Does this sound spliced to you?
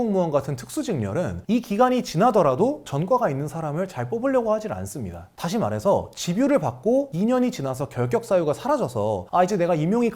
no; 0 cuts

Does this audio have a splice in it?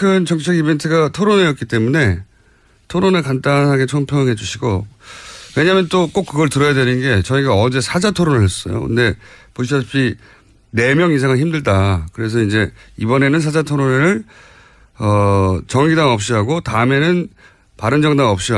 no; 0 cuts

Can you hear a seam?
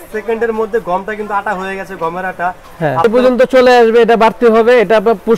yes; 1 cut; at 3.0 s

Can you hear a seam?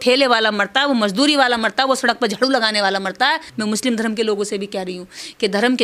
yes; 1 cut; at 3.5 s

